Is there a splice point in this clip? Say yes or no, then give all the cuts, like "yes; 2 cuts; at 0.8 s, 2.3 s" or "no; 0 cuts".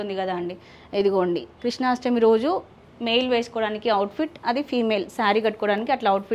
no; 0 cuts